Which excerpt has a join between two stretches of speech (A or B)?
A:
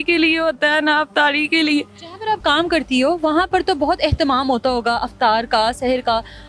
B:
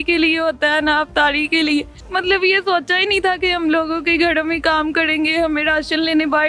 B